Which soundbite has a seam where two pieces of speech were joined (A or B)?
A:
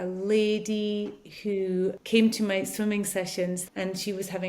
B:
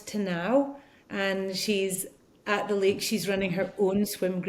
A